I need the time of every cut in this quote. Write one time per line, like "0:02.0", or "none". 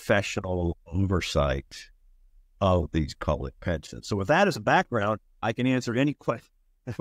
none